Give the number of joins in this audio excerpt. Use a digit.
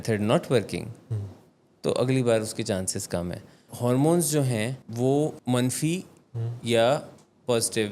3